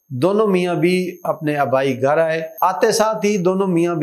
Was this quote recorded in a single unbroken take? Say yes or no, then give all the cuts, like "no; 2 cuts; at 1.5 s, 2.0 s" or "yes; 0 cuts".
yes; 0 cuts